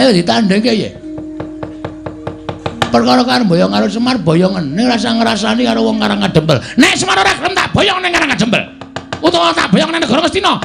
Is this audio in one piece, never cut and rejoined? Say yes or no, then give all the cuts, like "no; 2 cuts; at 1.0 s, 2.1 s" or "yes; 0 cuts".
yes; 0 cuts